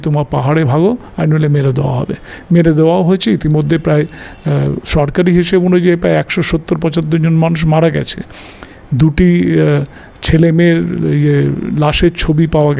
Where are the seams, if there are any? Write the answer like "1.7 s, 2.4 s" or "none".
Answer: none